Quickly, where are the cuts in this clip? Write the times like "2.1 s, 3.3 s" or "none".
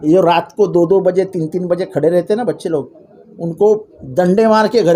none